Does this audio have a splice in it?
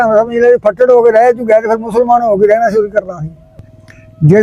yes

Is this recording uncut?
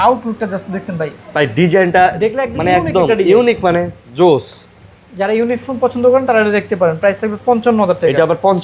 yes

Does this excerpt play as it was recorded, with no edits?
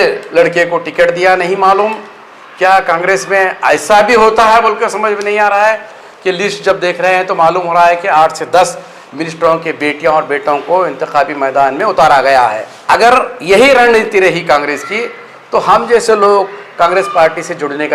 no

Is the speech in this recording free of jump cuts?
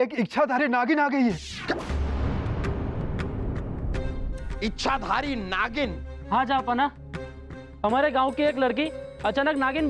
yes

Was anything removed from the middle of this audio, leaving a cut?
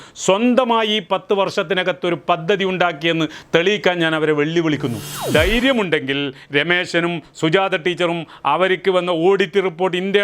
yes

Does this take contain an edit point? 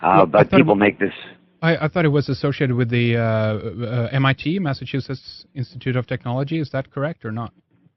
no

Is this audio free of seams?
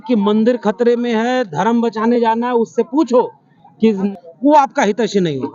no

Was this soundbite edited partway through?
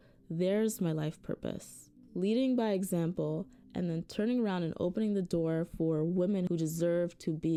no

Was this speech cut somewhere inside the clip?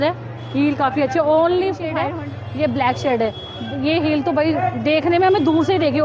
yes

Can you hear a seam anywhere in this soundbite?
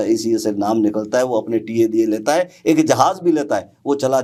no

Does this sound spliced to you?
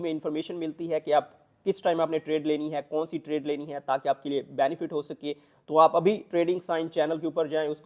no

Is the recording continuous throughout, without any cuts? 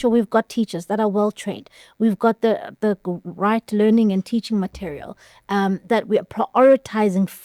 yes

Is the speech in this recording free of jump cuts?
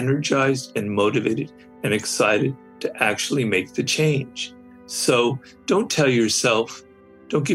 yes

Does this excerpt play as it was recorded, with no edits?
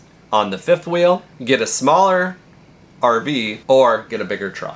no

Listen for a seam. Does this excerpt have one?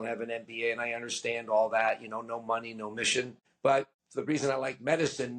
yes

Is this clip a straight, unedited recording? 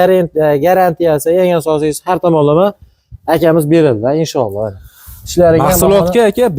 yes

